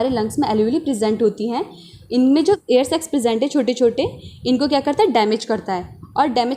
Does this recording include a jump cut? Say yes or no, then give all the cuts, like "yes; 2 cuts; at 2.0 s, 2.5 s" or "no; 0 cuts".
yes; 1 cut; at 2.6 s